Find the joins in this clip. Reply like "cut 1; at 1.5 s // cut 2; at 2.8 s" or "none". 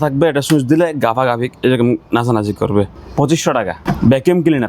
cut 1; at 3.0 s // cut 2; at 3.8 s